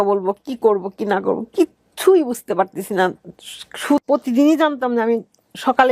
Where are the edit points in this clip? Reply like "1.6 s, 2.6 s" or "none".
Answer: 4.0 s